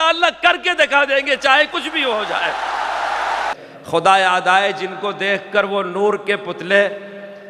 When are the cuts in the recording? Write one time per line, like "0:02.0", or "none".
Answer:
0:03.5